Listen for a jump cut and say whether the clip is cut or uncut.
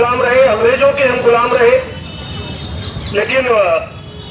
uncut